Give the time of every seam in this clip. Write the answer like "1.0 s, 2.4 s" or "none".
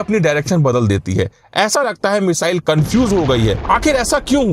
3.6 s